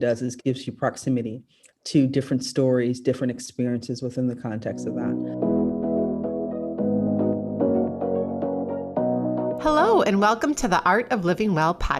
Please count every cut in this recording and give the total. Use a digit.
1